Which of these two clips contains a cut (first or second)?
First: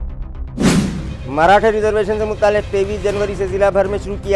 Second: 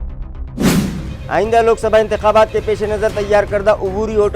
second